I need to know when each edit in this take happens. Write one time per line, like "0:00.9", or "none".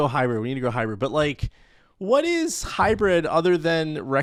none

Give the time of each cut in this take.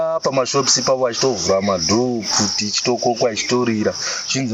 none

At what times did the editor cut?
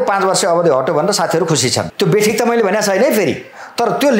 0:01.9

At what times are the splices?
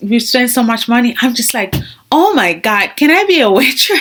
none

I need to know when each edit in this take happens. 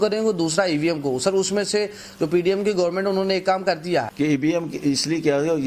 0:04.1

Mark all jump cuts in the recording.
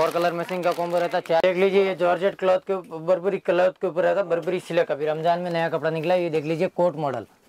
0:01.4

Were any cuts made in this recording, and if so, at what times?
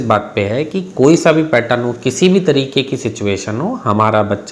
none

